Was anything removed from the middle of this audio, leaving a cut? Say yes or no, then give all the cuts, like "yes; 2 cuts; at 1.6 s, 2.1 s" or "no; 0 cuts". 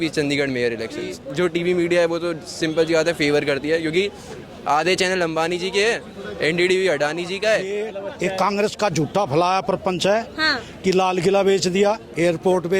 yes; 2 cuts; at 1.2 s, 7.9 s